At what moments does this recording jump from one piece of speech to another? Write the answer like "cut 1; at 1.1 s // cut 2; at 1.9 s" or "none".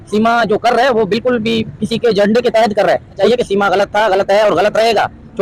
cut 1; at 3.2 s